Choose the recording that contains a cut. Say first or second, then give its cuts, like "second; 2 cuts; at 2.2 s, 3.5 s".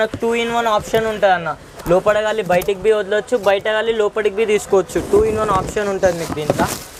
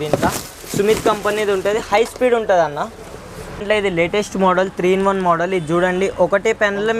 second; 1 cut; at 3.6 s